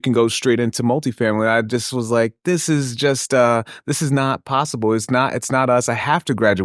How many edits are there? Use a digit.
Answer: 0